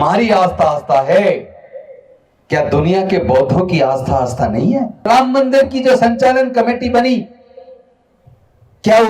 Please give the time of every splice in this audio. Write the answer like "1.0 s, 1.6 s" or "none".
5.1 s